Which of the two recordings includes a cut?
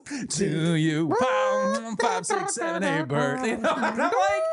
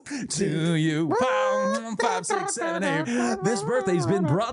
second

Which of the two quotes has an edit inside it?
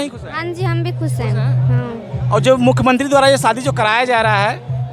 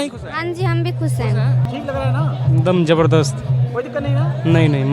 second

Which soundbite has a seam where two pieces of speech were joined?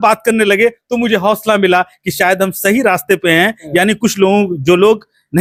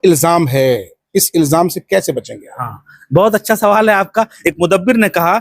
second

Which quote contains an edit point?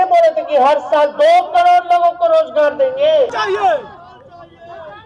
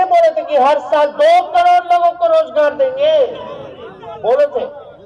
first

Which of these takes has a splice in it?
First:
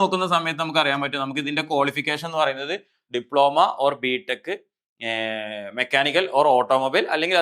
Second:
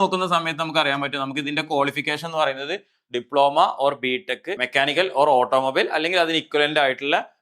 second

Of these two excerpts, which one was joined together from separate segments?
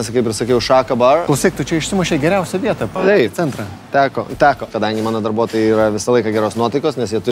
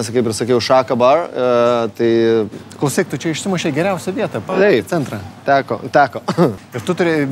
first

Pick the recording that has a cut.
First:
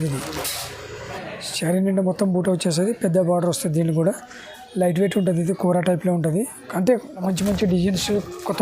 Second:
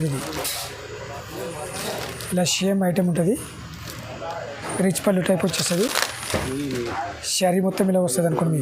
first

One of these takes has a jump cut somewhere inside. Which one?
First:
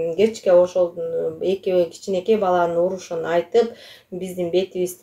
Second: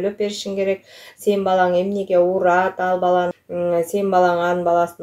second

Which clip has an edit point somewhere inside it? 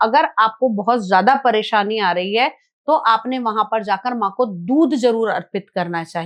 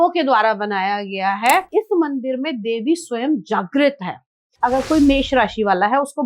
second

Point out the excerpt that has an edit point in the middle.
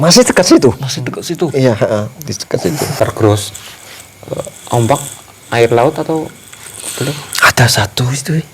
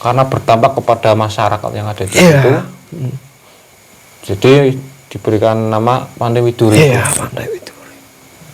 first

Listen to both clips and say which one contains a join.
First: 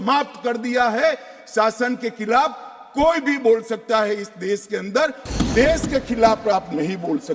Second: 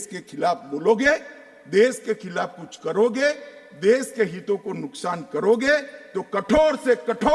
first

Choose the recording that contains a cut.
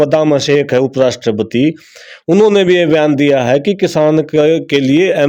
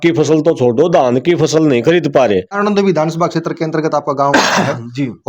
second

